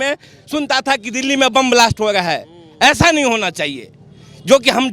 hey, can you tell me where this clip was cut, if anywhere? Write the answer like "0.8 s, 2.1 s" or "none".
none